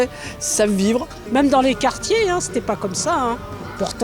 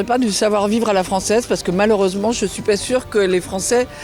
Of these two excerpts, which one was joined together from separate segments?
first; 1 cut; at 1.2 s

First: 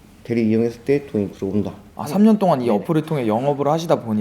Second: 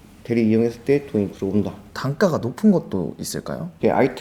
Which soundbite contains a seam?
first; 1 cut; at 1.9 s

